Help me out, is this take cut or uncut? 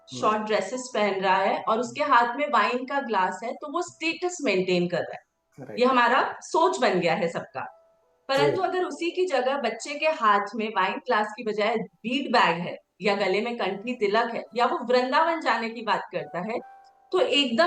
uncut